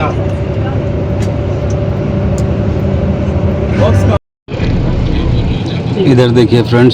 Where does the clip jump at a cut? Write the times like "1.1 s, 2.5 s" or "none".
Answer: 4.2 s